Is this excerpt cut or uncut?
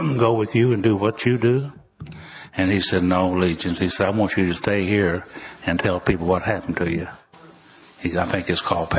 uncut